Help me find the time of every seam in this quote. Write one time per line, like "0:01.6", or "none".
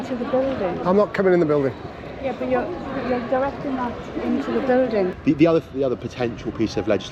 0:05.2